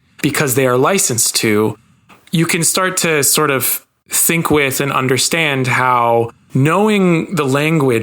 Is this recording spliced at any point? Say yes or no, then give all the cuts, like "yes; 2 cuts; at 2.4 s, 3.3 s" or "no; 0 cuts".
yes; 1 cut; at 6.4 s